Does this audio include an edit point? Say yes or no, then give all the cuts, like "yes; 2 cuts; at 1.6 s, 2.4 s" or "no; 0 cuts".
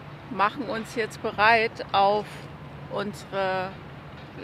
no; 0 cuts